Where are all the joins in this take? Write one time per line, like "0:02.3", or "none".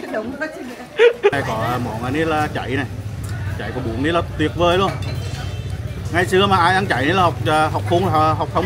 0:01.4